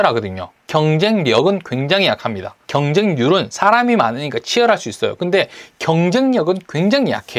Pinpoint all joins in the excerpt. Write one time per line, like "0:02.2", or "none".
none

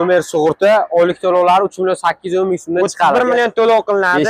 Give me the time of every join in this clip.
none

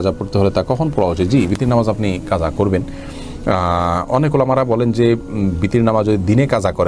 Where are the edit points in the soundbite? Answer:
none

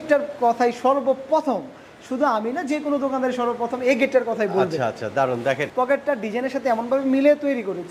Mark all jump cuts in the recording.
0:05.7

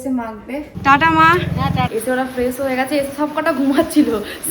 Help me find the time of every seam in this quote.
0:01.9

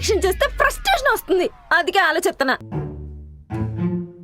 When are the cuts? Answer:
0:02.6

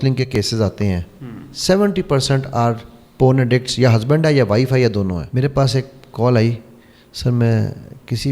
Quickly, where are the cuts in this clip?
0:05.3

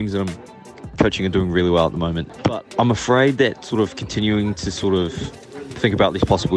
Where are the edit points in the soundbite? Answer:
0:02.2

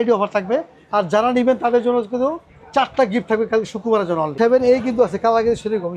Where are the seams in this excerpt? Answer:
0:04.3

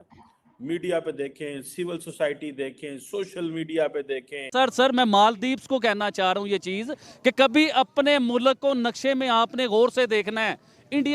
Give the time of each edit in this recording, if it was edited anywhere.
0:04.4

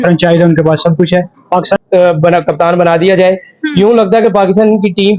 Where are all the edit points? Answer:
0:01.8

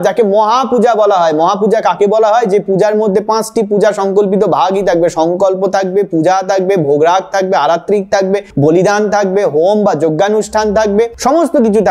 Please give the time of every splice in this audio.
none

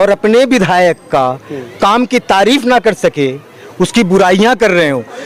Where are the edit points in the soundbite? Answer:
none

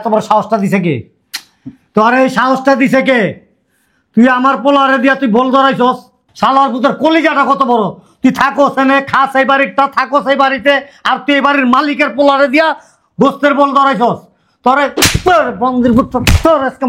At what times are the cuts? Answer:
none

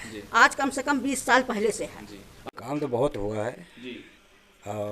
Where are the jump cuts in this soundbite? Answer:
0:02.3

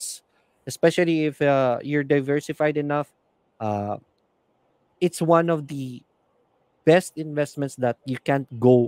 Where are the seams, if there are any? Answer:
none

